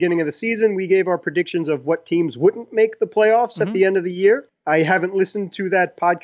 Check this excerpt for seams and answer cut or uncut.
uncut